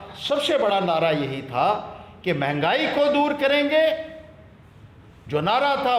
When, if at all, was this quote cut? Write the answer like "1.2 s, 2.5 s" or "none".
none